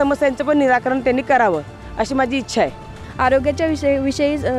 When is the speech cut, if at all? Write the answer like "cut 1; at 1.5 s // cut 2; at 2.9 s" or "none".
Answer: cut 1; at 3.0 s